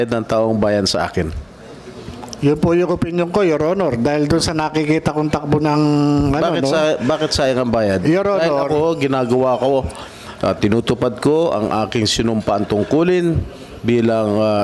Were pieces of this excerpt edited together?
no; 0 cuts

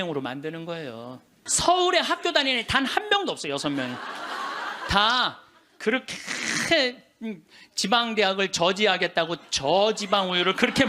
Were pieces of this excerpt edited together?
yes; 1 cut; at 1.4 s

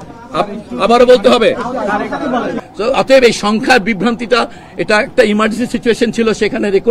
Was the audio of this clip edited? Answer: yes; 1 cut; at 2.6 s

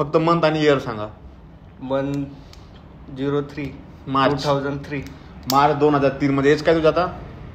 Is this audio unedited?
yes; 0 cuts

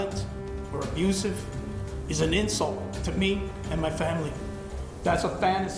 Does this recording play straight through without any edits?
yes; 0 cuts

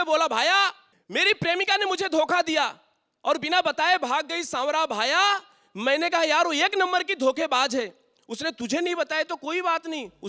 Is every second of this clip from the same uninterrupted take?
yes; 0 cuts

